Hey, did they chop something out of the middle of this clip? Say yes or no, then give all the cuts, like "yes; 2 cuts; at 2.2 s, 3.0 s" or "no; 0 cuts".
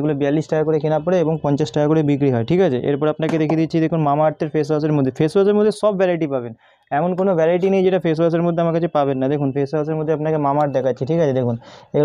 no; 0 cuts